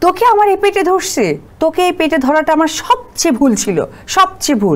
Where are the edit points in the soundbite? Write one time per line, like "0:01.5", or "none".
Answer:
0:01.4